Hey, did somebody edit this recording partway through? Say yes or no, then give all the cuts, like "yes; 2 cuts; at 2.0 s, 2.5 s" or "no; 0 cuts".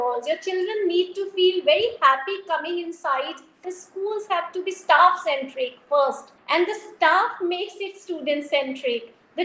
yes; 1 cut; at 3.7 s